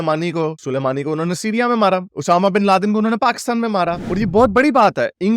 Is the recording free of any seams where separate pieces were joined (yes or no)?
no